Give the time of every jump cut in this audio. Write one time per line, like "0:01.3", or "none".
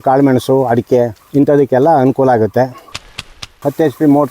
0:01.2
0:03.3